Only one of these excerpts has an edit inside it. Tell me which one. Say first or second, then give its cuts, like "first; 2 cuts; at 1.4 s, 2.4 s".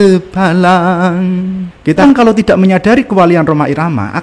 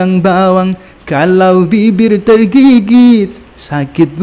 first; 1 cut; at 2.0 s